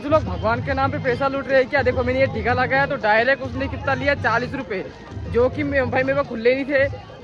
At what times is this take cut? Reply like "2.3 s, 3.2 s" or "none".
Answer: none